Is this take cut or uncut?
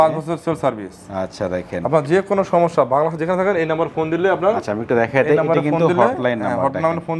uncut